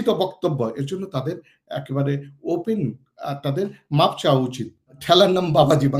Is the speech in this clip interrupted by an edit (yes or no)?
yes